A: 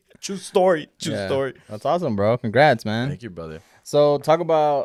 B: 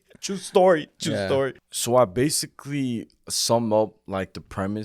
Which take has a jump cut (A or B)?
B